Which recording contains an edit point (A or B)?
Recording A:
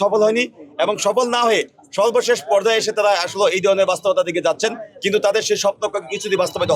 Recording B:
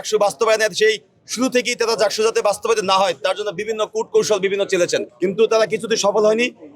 B